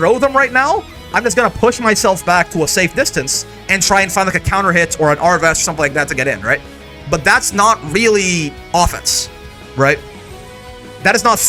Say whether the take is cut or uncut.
uncut